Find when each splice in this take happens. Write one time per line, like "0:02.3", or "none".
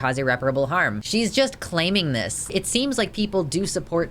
0:01.0
0:02.5